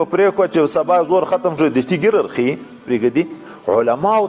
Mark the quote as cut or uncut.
cut